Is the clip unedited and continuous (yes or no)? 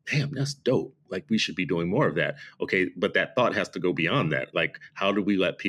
yes